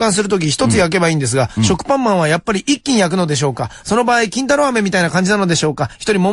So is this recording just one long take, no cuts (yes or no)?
yes